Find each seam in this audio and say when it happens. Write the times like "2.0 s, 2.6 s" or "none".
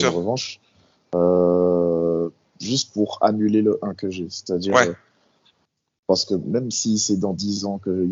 none